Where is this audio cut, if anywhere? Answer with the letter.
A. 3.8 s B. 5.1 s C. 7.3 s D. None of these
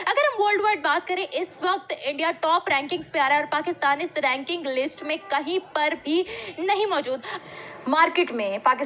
C